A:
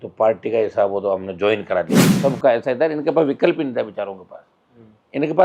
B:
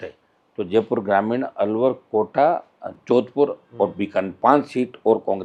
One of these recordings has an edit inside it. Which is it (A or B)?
A